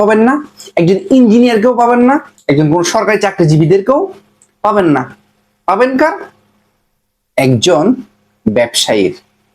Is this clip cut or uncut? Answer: cut